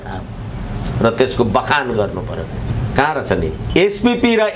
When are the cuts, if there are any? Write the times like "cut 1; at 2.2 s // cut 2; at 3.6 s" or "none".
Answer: cut 1; at 3.6 s